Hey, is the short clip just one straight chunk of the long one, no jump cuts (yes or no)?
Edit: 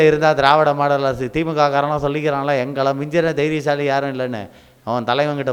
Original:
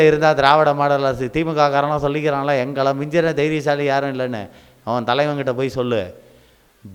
yes